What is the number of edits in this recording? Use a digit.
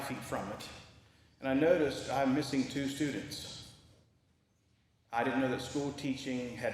1